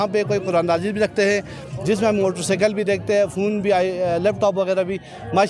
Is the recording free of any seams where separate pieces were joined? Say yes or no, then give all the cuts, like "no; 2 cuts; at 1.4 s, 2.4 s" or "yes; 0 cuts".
yes; 0 cuts